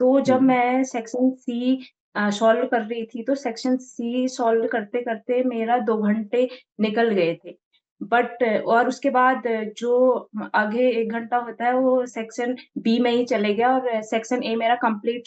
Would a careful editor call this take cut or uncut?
uncut